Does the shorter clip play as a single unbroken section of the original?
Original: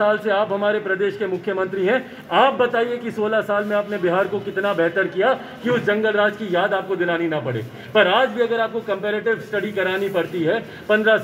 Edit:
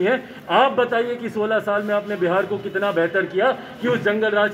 yes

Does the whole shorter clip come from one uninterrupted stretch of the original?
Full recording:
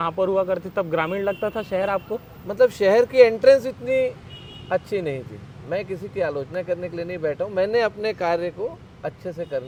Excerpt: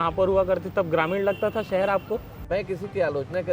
no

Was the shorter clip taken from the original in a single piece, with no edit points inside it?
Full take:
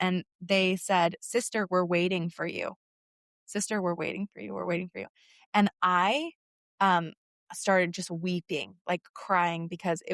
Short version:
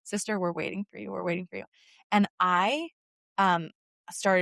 yes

